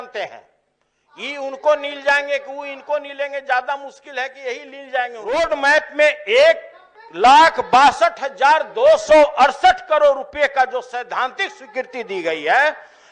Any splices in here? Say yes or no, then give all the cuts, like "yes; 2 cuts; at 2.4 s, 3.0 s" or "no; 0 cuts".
yes; 1 cut; at 5.2 s